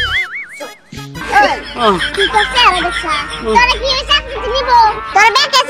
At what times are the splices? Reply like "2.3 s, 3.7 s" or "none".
1.2 s